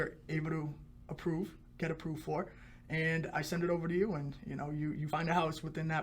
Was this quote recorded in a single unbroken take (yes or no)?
no